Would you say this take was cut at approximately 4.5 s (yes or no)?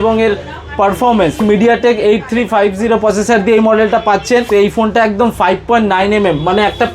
yes